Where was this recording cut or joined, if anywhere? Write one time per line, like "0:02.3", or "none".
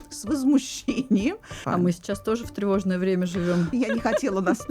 0:01.6
0:03.7

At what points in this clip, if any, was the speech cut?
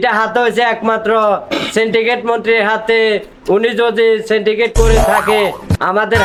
none

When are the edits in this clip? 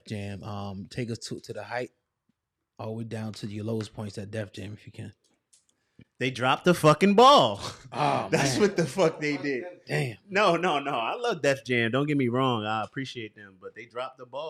none

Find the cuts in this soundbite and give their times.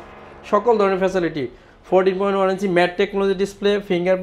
none

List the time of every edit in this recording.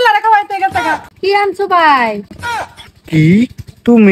0:01.1

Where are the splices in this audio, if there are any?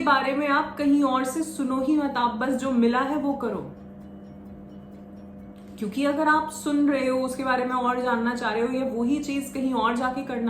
none

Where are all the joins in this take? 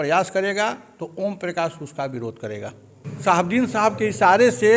0:03.1

